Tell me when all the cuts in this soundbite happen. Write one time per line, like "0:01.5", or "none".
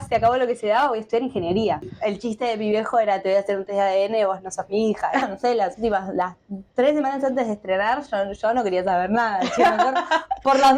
0:01.9
0:05.3